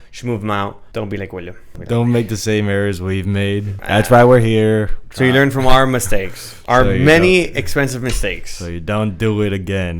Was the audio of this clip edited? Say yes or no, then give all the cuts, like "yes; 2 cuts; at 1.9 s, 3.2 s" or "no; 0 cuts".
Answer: yes; 4 cuts; at 0.8 s, 1.7 s, 3.8 s, 5.0 s